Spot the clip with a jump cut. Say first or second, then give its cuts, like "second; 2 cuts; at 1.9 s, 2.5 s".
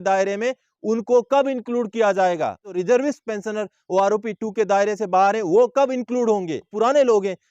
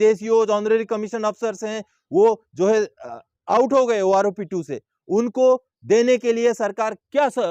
first; 2 cuts; at 2.8 s, 6.7 s